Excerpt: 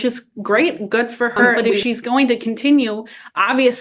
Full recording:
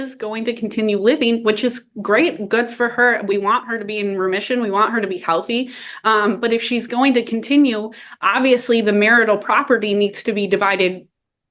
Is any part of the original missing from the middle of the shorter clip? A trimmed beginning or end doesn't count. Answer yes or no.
yes